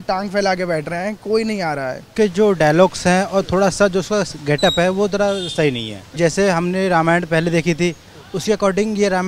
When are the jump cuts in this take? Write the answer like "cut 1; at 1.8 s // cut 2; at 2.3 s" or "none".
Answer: cut 1; at 2.1 s // cut 2; at 6.1 s